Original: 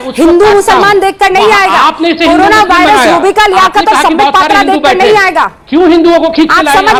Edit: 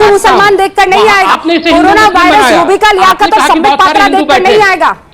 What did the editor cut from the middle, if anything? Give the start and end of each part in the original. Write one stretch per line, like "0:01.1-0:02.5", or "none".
0:01.8-0:01.9